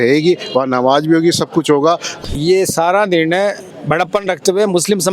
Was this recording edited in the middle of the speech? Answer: yes; 2 cuts; at 2.1 s, 3.7 s

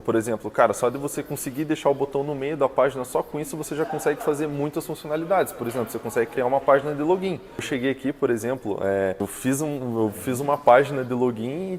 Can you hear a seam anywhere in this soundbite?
yes; 2 cuts; at 7.7 s, 9.2 s

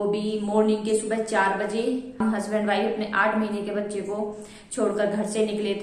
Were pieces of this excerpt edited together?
yes; 1 cut; at 2.2 s

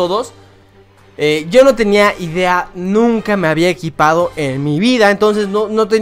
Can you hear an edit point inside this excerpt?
no; 0 cuts

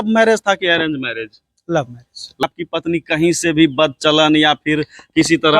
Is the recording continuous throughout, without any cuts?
no; 1 cut; at 2.4 s

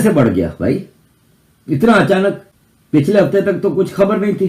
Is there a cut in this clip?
no; 0 cuts

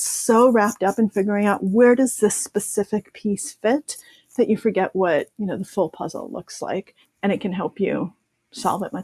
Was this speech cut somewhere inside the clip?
yes; 1 cut; at 7.0 s

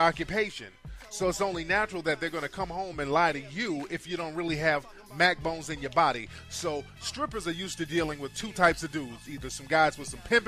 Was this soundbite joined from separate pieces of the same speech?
no; 0 cuts

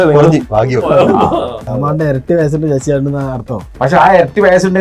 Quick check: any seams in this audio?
yes; 2 cuts; at 1.8 s, 3.6 s

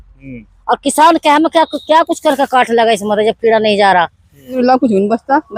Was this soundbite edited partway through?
yes; 1 cut; at 4.6 s

